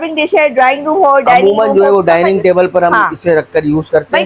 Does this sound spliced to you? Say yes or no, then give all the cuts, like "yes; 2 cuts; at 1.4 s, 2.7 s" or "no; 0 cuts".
no; 0 cuts